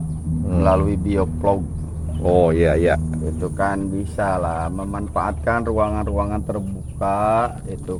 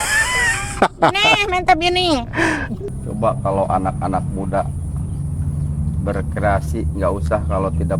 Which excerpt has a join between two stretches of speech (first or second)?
second